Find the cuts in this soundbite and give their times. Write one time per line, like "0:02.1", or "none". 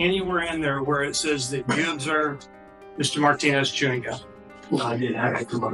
none